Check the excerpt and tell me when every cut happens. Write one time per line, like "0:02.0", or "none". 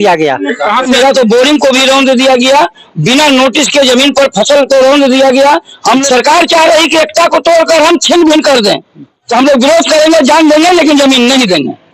0:00.9
0:06.0
0:09.2